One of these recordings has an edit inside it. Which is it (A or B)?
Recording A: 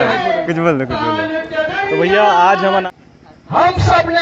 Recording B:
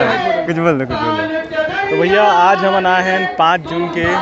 A